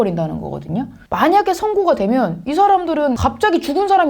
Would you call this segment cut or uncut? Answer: cut